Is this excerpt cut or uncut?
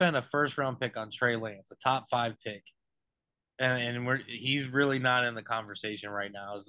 uncut